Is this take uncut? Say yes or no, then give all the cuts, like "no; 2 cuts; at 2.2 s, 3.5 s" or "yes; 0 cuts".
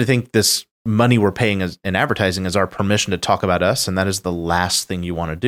yes; 0 cuts